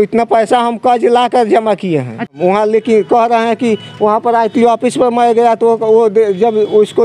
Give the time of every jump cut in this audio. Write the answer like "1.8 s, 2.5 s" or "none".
2.3 s